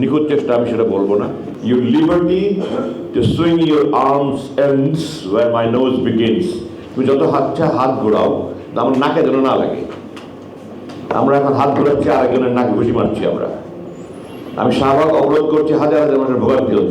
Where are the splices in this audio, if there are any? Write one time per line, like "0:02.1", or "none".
0:01.5